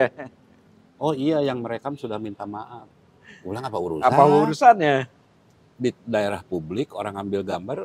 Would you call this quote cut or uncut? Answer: uncut